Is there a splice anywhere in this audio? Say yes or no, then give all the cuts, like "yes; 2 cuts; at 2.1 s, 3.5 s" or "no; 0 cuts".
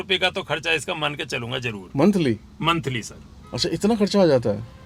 no; 0 cuts